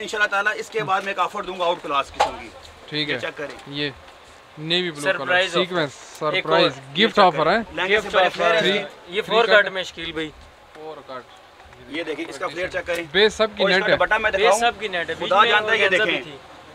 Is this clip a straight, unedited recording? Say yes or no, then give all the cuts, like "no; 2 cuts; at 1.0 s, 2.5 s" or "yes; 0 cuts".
yes; 0 cuts